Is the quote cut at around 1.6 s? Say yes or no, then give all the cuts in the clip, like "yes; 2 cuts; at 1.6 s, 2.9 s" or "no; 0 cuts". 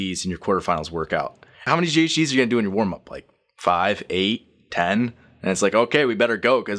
yes; 1 cut; at 1.6 s